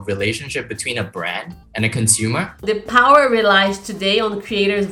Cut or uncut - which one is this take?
cut